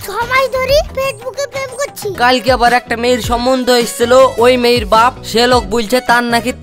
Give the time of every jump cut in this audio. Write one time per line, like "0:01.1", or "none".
0:02.1